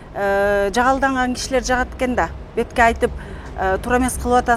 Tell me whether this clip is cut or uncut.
uncut